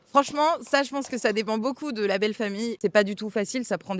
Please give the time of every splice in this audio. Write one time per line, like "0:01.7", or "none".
0:02.8